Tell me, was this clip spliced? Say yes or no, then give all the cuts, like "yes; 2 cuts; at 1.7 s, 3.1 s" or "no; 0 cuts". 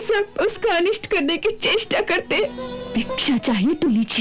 yes; 1 cut; at 2.7 s